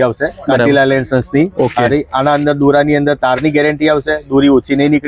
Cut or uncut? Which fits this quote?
uncut